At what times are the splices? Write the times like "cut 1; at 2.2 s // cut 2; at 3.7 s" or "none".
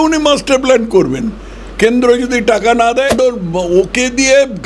cut 1; at 3.1 s